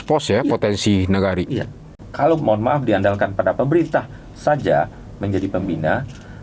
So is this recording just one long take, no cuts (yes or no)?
no